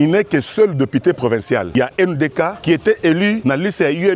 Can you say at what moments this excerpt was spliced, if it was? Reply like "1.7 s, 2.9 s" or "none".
1.7 s, 2.6 s, 3.4 s